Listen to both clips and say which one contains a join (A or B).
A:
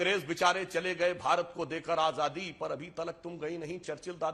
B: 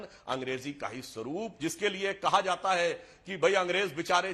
B